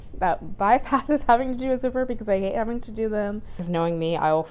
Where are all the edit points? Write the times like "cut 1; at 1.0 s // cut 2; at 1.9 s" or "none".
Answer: cut 1; at 3.6 s